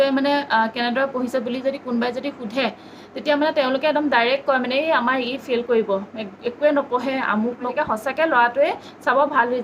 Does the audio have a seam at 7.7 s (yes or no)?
yes